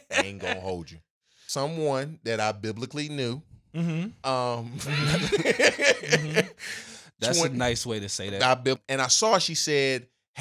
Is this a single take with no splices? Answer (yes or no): no